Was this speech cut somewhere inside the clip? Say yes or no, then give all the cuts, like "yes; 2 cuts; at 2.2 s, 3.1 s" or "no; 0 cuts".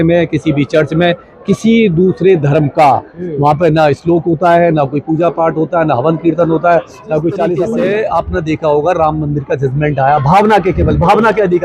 yes; 1 cut; at 7.6 s